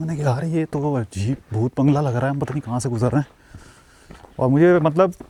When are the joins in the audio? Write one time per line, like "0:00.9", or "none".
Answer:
none